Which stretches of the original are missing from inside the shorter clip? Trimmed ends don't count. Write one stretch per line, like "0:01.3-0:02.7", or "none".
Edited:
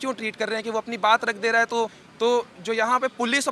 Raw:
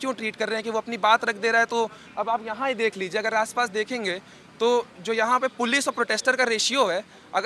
0:02.0-0:04.4